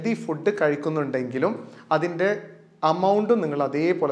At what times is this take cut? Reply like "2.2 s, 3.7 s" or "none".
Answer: none

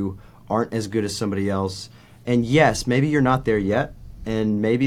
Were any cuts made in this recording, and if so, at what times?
none

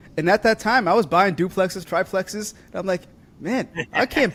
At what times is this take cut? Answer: none

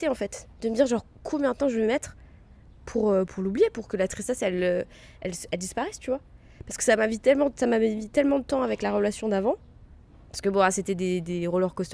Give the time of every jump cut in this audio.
none

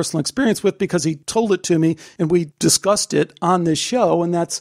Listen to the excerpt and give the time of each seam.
1.2 s, 2.3 s

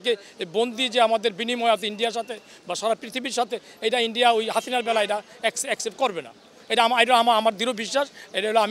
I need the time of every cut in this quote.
none

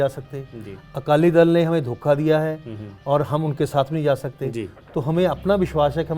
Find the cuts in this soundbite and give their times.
none

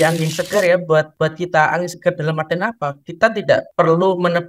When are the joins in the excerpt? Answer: 1.1 s, 3.7 s

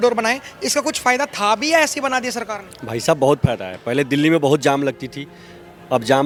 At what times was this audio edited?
none

